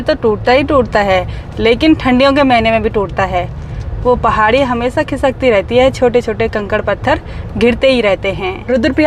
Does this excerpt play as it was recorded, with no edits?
yes; 0 cuts

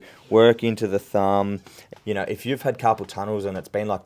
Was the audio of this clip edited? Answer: yes; 1 cut; at 1.7 s

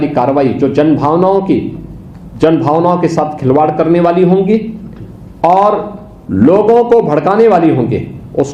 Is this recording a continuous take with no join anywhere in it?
yes; 0 cuts

